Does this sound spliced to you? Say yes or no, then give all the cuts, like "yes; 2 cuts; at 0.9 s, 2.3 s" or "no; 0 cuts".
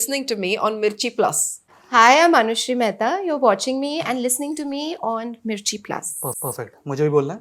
no; 0 cuts